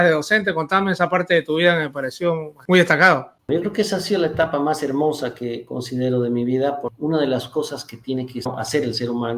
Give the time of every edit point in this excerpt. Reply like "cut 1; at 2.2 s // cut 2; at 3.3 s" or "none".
cut 1; at 2.5 s // cut 2; at 3.4 s // cut 3; at 6.9 s // cut 4; at 8.5 s